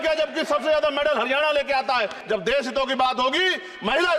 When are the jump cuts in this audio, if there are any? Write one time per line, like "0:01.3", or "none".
0:02.2